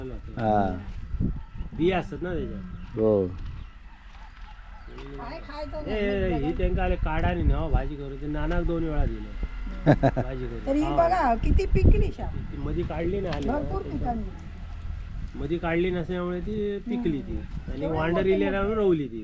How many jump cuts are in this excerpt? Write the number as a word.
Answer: zero